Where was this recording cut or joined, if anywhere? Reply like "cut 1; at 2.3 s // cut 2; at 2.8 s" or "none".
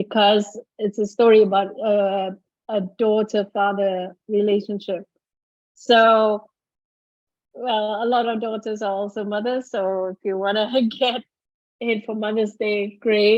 none